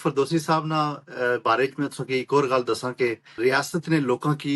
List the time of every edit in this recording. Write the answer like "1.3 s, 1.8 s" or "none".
3.3 s